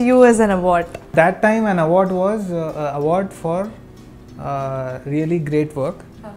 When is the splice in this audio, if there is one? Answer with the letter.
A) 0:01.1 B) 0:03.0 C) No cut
A